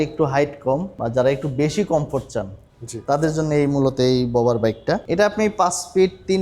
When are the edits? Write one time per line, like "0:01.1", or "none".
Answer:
0:00.9
0:05.0